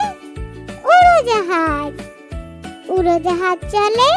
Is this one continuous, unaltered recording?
yes; 0 cuts

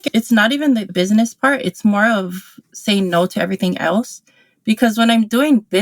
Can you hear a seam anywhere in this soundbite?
yes; 1 cut; at 0.9 s

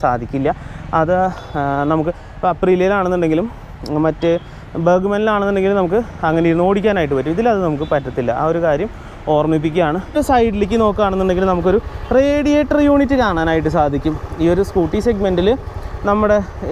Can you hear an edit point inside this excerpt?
yes; 1 cut; at 10.1 s

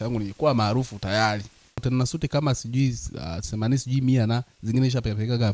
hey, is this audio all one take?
no; 1 cut; at 1.8 s

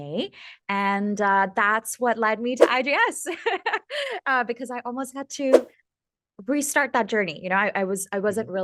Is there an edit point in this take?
no; 0 cuts

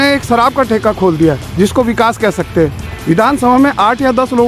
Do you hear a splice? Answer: yes; 1 cut; at 2.9 s

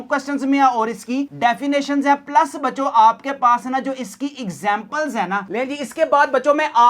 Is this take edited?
yes; 1 cut; at 5.5 s

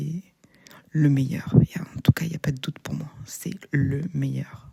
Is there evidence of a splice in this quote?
no; 0 cuts

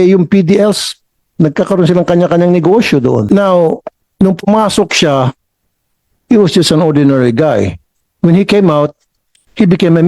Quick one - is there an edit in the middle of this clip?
yes; 1 cut; at 3.3 s

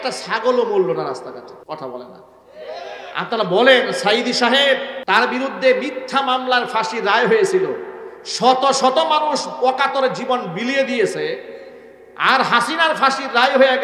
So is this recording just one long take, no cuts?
no; 2 cuts; at 1.6 s, 4.9 s

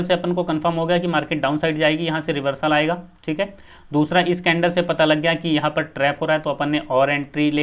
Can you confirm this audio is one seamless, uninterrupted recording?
yes; 0 cuts

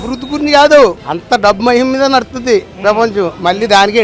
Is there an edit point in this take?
yes; 1 cut; at 1.1 s

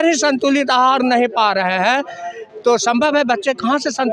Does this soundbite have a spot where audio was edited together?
no; 0 cuts

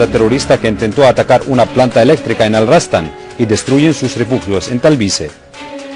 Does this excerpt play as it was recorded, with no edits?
yes; 0 cuts

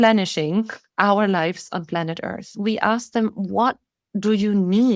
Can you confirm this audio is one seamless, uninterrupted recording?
no; 1 cut; at 2.6 s

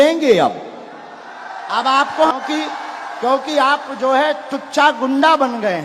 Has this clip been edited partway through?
yes; 1 cut; at 2.3 s

